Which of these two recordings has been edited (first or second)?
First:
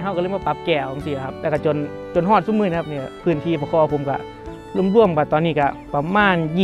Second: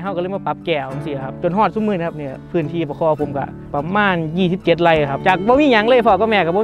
second